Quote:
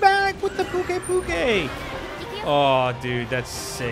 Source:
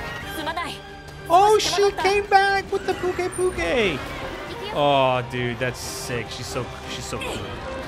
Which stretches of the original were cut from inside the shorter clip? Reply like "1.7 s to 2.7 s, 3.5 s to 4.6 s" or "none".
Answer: none